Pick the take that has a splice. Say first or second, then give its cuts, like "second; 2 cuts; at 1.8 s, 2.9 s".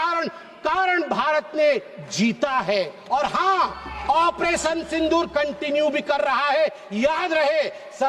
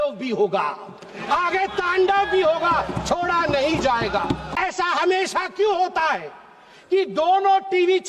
second; 1 cut; at 4.5 s